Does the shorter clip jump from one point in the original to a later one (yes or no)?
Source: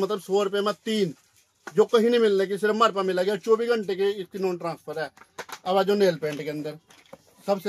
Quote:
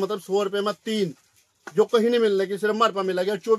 no